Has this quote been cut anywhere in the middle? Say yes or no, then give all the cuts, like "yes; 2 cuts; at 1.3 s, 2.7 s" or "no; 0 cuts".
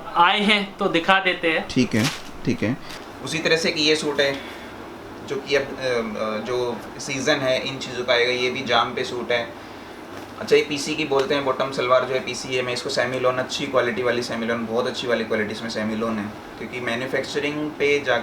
yes; 1 cut; at 2.9 s